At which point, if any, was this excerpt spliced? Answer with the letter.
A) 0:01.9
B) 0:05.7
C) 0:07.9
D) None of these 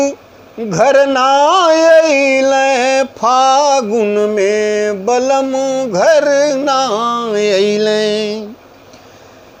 D